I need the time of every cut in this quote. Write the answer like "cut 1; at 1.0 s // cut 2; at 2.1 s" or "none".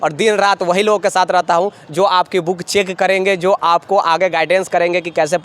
none